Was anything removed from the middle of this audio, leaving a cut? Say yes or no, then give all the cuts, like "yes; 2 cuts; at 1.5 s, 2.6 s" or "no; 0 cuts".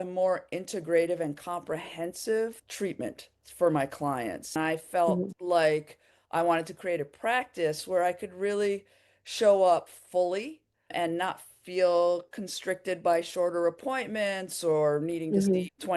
yes; 1 cut; at 4.5 s